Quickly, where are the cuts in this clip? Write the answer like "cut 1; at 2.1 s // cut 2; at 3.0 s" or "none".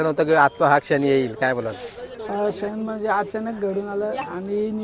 none